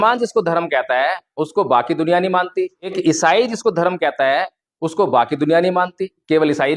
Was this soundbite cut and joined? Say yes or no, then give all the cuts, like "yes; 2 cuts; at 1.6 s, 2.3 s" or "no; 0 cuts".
yes; 1 cut; at 3.0 s